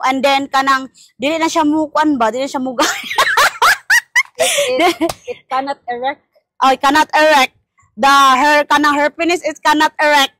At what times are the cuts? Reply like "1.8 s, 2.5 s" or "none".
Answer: none